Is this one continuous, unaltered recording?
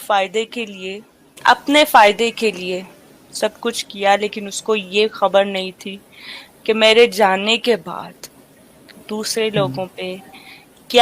no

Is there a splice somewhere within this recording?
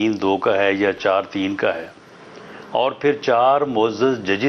no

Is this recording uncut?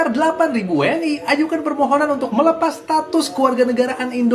yes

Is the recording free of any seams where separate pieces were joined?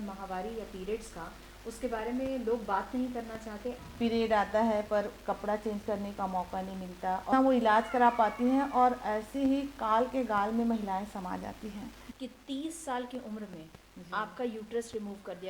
no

